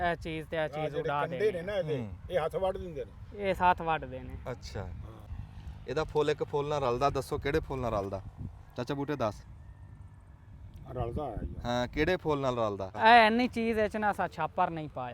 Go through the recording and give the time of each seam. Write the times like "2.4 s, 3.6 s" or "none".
5.3 s, 12.9 s